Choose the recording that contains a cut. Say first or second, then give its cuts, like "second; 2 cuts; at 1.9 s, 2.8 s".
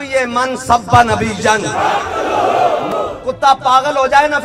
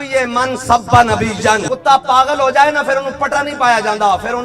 second; 1 cut; at 1.7 s